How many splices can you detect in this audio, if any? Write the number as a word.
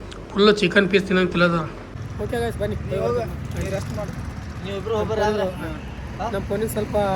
one